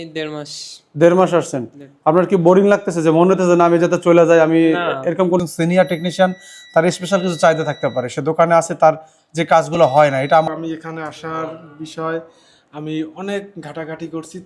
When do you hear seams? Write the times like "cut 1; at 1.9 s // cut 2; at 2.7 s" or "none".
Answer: cut 1; at 5.4 s // cut 2; at 10.5 s